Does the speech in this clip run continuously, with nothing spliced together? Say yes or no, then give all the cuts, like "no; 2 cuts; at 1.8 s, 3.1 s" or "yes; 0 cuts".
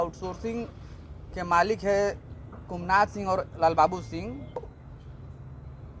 no; 1 cut; at 4.7 s